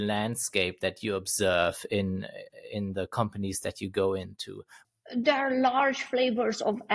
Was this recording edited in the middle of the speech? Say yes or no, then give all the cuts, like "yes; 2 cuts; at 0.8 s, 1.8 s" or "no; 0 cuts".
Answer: no; 0 cuts